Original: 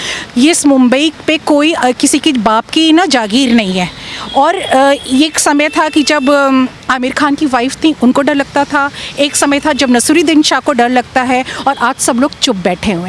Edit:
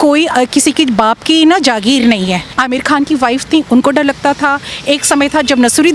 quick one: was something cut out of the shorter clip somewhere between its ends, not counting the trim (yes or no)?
yes